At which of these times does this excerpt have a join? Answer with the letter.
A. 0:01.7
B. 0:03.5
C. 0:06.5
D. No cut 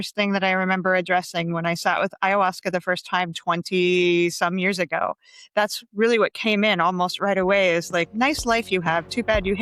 D